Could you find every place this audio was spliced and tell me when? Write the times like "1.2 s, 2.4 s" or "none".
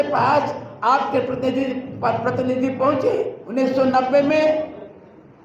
3.4 s